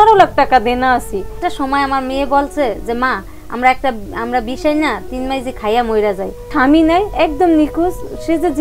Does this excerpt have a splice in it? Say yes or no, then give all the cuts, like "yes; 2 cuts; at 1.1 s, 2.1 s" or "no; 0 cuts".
yes; 2 cuts; at 1.4 s, 6.5 s